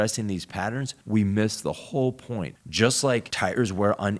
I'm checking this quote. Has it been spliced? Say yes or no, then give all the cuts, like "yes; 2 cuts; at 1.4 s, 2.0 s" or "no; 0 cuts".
yes; 2 cuts; at 0.9 s, 2.6 s